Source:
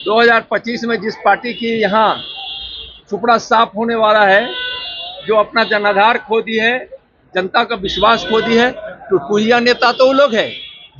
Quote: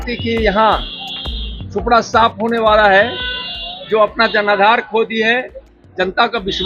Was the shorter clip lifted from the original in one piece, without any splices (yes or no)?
yes